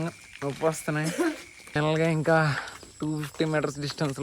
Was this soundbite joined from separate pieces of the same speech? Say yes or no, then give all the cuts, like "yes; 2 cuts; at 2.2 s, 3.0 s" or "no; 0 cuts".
yes; 1 cut; at 1.8 s